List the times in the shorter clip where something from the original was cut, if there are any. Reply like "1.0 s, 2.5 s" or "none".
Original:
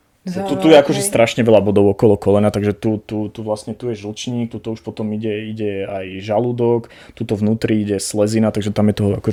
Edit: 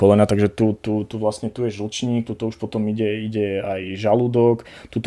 none